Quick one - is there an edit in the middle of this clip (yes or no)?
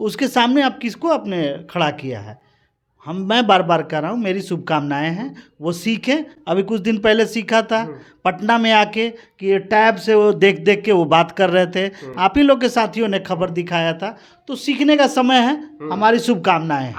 no